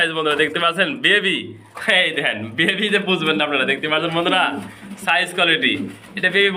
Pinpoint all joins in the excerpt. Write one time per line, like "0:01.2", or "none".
none

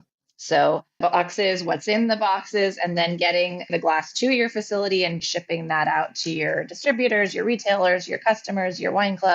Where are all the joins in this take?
0:05.2

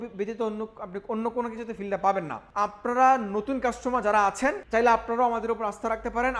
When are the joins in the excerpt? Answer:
0:02.4
0:04.6

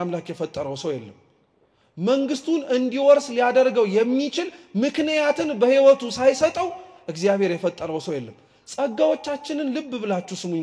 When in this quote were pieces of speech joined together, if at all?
none

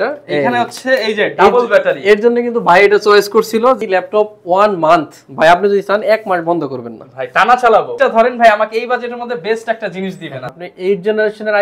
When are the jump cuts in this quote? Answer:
0:03.8
0:07.9
0:10.6

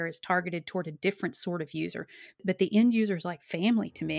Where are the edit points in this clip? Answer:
none

